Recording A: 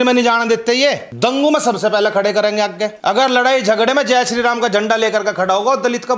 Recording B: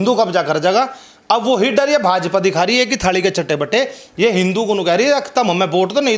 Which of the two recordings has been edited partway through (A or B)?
A